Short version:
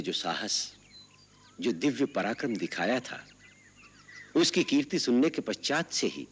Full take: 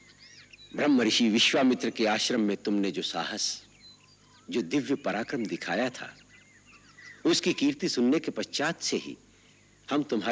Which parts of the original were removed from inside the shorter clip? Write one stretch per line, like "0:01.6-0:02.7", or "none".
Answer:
none